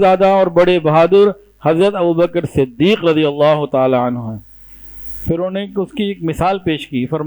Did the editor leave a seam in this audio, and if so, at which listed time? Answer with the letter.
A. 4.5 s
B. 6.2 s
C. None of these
C